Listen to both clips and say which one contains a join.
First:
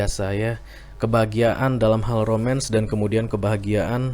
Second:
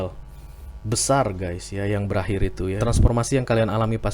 second; 1 cut; at 2.8 s

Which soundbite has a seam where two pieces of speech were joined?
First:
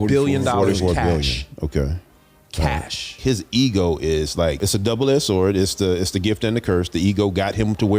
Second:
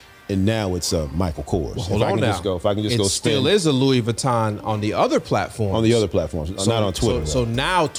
first; 2 cuts; at 3.2 s, 4.6 s

